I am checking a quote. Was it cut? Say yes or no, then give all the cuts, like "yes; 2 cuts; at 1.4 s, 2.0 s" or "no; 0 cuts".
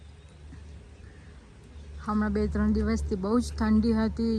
no; 0 cuts